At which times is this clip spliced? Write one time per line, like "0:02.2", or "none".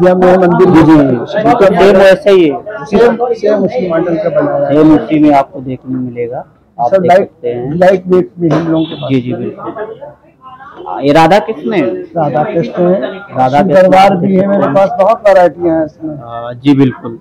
none